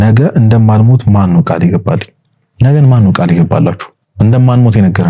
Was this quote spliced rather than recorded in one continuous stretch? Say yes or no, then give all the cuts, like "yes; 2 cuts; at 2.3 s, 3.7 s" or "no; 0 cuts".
no; 0 cuts